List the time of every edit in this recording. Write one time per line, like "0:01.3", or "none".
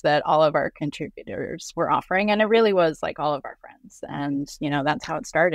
0:01.6
0:03.9